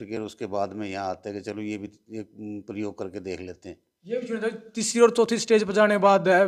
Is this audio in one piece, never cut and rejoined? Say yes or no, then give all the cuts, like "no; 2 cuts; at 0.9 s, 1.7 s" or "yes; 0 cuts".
yes; 0 cuts